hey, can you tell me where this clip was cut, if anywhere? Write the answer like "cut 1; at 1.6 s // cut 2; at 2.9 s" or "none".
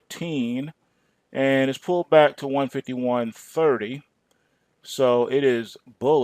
cut 1; at 2.8 s